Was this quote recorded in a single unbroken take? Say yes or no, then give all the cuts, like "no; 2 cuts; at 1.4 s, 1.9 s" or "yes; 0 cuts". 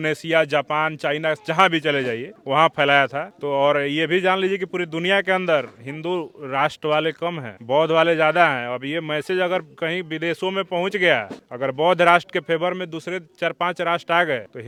yes; 0 cuts